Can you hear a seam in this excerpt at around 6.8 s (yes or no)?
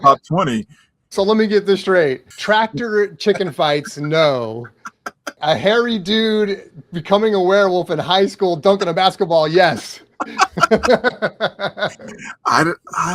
no